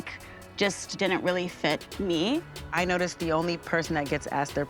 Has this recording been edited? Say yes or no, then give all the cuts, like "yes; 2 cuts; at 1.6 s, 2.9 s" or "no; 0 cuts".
yes; 1 cut; at 2.5 s